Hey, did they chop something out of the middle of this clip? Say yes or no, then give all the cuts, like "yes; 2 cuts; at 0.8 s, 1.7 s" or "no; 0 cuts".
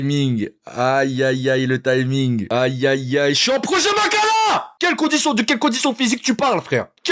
no; 0 cuts